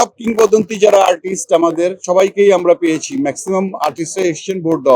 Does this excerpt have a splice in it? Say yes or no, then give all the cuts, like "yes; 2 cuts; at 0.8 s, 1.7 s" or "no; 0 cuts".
yes; 1 cut; at 2.0 s